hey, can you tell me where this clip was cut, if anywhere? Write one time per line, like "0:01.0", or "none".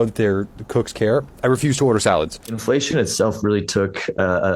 0:02.4